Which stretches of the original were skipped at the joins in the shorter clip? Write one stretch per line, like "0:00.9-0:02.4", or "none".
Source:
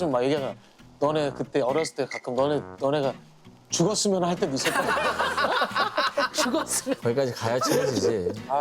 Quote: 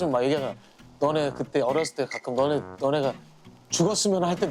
none